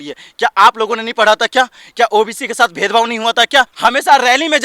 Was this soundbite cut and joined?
yes; 1 cut; at 3.7 s

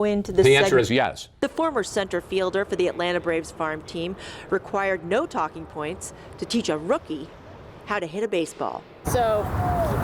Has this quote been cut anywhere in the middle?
yes; 1 cut; at 1.3 s

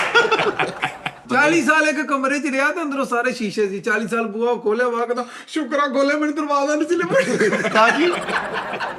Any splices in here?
yes; 1 cut; at 1.1 s

